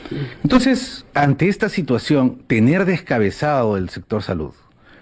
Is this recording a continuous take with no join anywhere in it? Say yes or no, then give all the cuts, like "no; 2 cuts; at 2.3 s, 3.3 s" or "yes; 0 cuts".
no; 1 cut; at 1.1 s